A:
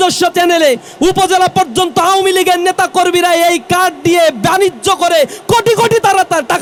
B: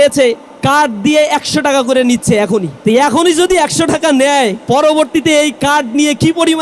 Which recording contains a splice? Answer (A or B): B